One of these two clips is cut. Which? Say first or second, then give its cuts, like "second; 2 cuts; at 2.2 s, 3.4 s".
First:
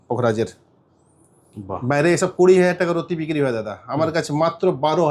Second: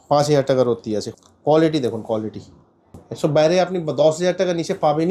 second; 2 cuts; at 1.1 s, 3.0 s